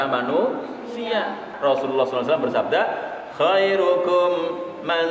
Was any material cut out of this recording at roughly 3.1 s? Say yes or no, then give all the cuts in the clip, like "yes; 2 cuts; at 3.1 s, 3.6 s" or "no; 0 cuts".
no; 1 cut; at 1.4 s